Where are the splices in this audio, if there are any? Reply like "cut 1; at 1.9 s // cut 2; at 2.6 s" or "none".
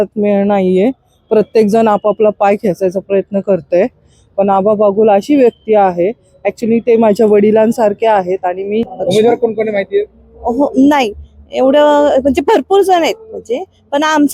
cut 1; at 9.0 s